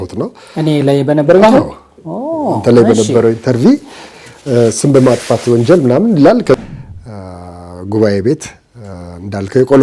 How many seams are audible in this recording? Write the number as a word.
one